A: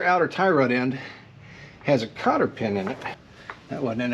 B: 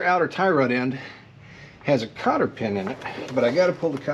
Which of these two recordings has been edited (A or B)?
A